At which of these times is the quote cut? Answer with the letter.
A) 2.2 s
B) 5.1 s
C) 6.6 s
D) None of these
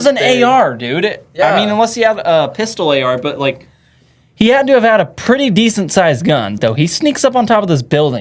C